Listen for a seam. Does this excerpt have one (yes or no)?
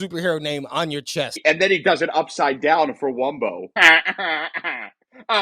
yes